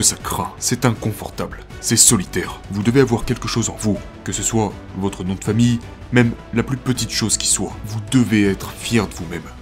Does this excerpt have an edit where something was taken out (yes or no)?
yes